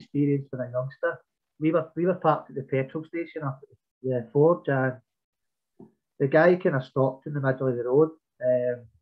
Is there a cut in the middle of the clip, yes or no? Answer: yes